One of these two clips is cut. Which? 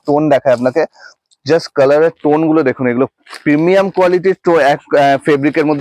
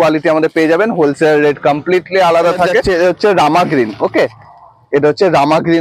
second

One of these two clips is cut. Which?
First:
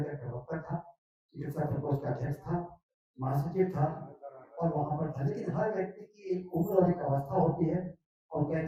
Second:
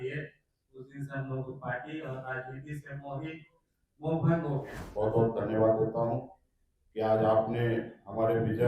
second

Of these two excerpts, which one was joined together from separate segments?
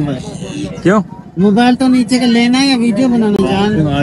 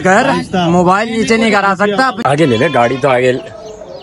second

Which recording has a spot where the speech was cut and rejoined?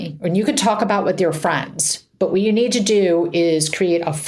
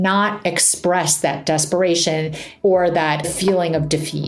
second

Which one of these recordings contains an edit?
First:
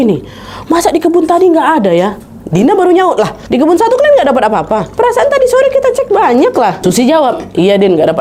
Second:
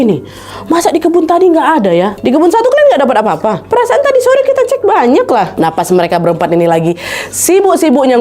second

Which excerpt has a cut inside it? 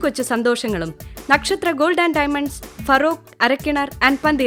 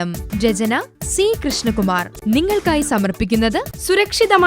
second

